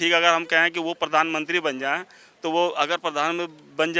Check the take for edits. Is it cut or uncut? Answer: uncut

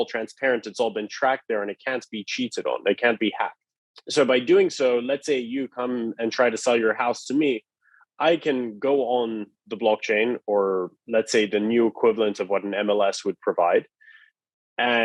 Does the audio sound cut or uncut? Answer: uncut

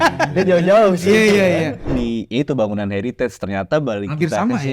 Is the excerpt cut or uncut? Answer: cut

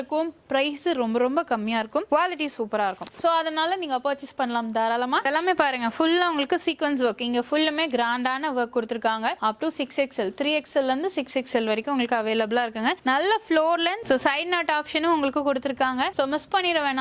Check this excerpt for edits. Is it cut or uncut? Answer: uncut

